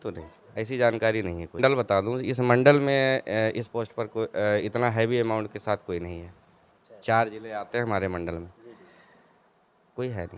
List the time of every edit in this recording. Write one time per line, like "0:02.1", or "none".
0:01.6